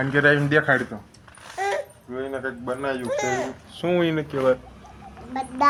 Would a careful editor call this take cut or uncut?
uncut